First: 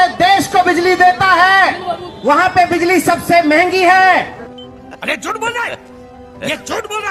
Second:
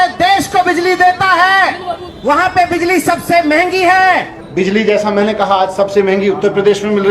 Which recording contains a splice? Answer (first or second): second